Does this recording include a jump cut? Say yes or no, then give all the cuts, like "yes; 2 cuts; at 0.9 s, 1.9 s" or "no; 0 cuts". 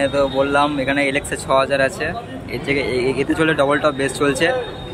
no; 0 cuts